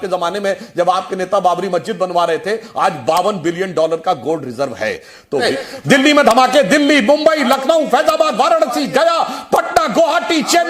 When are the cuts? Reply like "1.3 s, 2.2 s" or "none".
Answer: 5.5 s

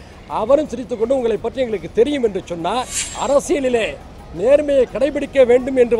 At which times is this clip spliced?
3.0 s

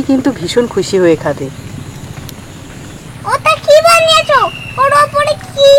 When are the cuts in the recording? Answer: 3.1 s

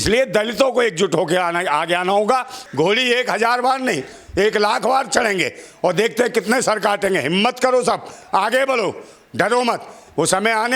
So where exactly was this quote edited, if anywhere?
2.6 s

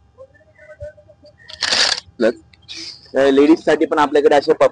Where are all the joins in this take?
2.2 s

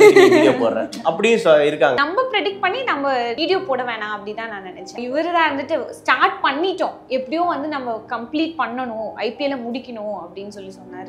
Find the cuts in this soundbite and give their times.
2.0 s, 3.4 s, 5.0 s

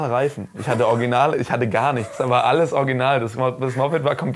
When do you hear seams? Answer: none

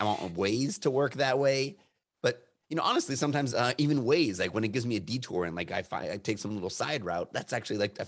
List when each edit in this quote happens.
none

